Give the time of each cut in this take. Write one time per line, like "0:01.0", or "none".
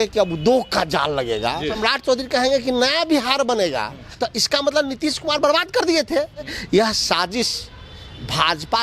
0:01.8
0:04.0
0:06.6